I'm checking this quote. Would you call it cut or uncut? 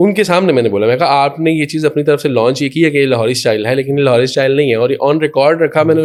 uncut